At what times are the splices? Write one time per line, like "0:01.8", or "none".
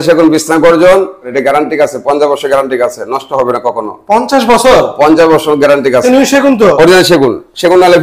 0:01.3
0:06.0